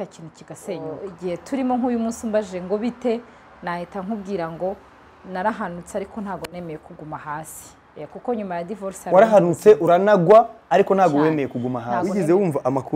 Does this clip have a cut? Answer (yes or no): yes